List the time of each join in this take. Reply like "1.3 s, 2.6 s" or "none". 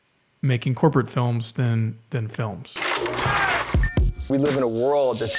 2.8 s